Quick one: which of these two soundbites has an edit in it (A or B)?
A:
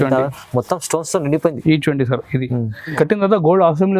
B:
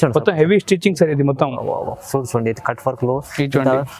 A